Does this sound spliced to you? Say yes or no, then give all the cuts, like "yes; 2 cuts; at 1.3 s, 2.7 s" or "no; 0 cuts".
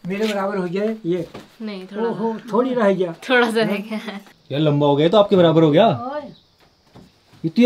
no; 0 cuts